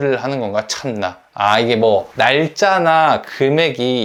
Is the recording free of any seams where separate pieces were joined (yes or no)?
yes